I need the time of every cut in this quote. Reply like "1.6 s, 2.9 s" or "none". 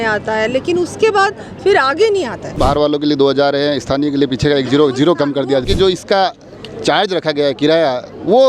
2.5 s, 5.7 s